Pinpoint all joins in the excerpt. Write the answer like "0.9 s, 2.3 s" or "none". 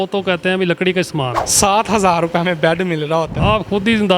1.4 s, 3.3 s